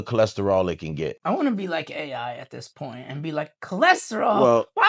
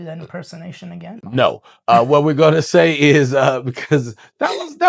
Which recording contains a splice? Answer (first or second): second